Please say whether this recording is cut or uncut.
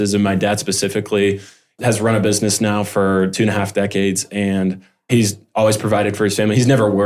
uncut